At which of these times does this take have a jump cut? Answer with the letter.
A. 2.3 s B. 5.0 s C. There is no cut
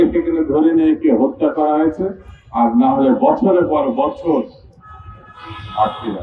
C